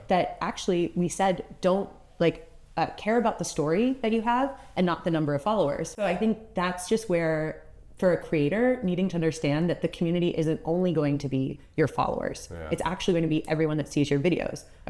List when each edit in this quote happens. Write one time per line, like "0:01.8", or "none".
0:05.9

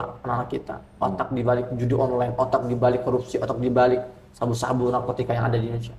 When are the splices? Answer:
none

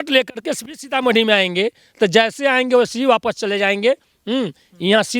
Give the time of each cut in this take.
none

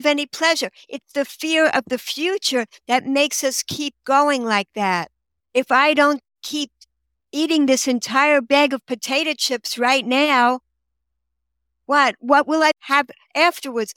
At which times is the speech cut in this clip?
0:12.8

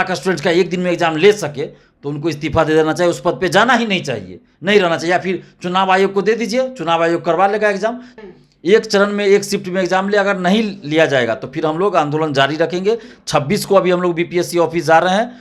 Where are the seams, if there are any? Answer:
0:08.1

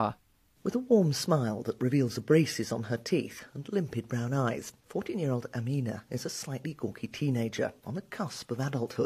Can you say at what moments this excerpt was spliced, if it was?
0:02.5

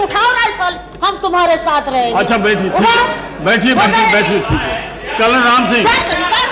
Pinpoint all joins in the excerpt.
none

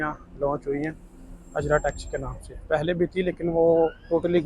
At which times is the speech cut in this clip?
none

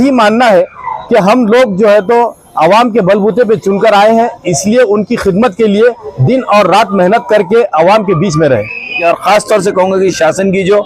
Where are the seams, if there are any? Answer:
0:09.0

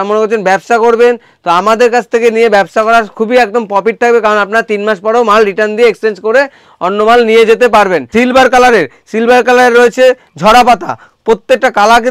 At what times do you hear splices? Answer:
0:08.0

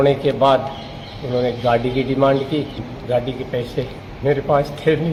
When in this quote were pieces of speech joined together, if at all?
none

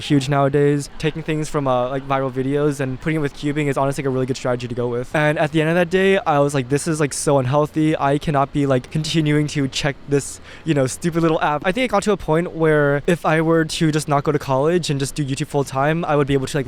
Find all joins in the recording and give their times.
0:00.9
0:03.0
0:05.1
0:08.9
0:11.6
0:13.0

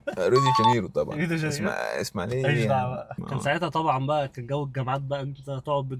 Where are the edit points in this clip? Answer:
0:03.1

